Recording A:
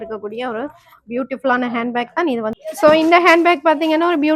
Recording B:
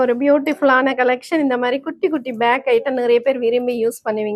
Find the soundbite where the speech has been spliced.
A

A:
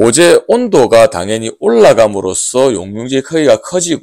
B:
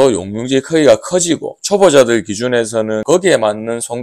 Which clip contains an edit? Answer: B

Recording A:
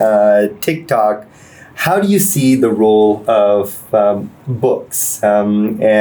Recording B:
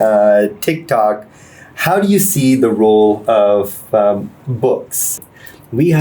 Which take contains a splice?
B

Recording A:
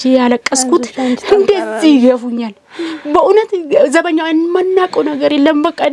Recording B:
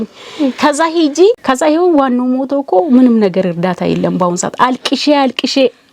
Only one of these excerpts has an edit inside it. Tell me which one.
B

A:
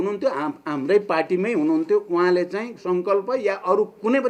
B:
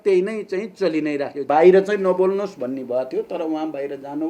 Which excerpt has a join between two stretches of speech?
B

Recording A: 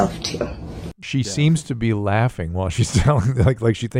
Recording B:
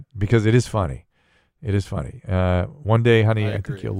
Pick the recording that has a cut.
A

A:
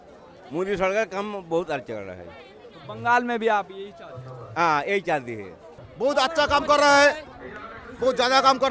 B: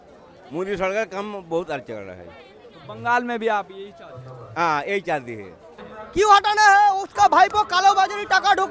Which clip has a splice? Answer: B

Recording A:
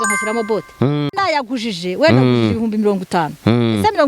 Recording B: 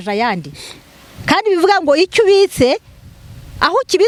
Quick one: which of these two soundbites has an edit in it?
A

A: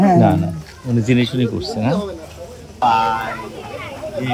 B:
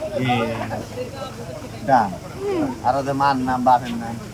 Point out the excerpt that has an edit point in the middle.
A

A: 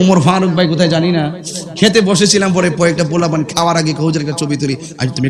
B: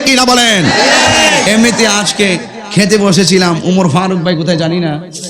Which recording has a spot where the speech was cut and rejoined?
B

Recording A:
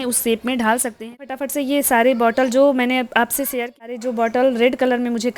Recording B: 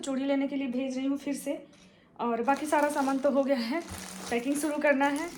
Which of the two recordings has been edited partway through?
A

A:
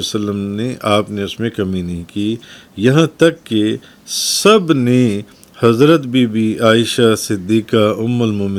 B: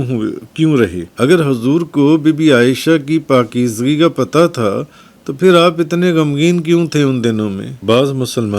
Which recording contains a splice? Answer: B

